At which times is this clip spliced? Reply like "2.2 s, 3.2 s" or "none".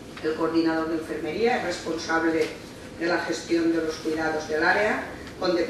1.6 s

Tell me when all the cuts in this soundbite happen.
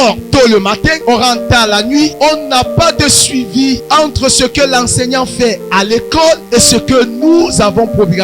1.0 s, 2.1 s, 3.8 s, 6.4 s

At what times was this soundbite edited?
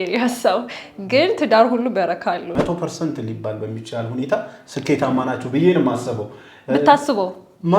2.5 s

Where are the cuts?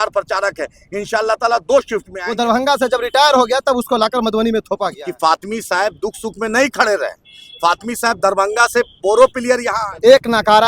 2.2 s, 5.0 s, 9.7 s

